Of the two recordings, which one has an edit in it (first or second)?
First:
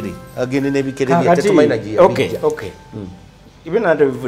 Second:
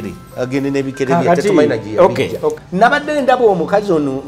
second